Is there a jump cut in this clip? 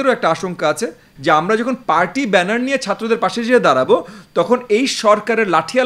yes; 1 cut; at 1.1 s

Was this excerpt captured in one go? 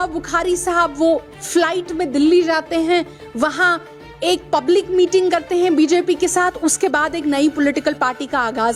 yes; 0 cuts

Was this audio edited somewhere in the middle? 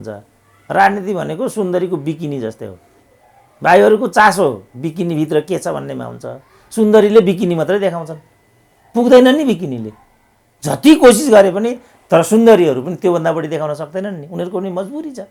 no; 0 cuts

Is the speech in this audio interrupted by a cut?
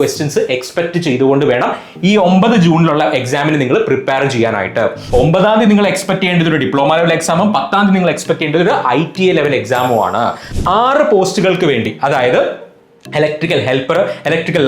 yes; 2 cuts; at 5.0 s, 10.5 s

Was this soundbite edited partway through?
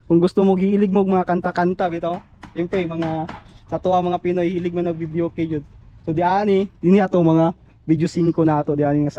no; 0 cuts

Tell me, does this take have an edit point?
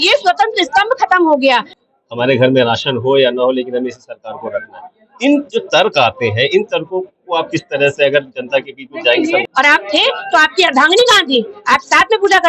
yes; 2 cuts; at 1.7 s, 9.4 s

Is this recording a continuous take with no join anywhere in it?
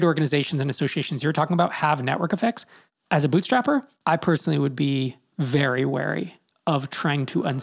yes; 0 cuts

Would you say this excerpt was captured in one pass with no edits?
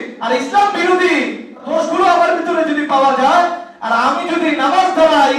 no; 1 cut; at 1.6 s

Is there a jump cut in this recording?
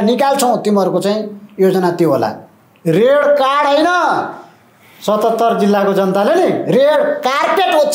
no; 0 cuts

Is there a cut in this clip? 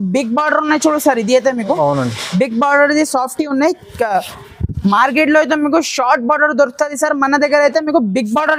no; 0 cuts

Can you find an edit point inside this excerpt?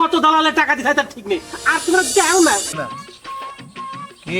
yes; 1 cut; at 2.8 s

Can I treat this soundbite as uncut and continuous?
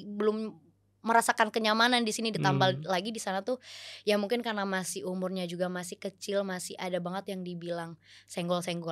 yes; 0 cuts

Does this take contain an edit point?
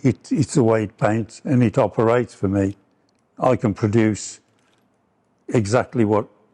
no; 0 cuts

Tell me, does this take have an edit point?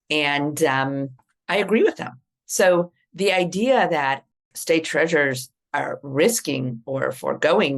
no; 0 cuts

